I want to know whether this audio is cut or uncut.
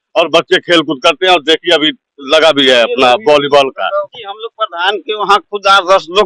cut